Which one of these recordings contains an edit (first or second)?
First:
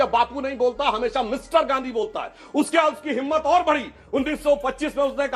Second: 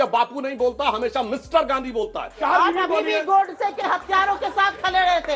second